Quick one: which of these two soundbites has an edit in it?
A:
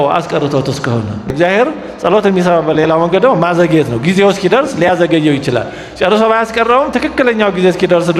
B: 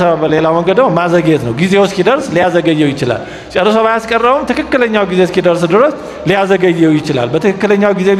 A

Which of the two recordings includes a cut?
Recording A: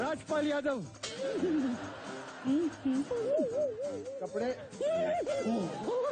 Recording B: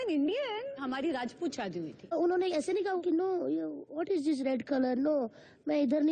B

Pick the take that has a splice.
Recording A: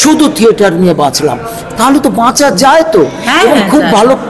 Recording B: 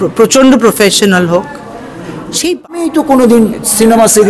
B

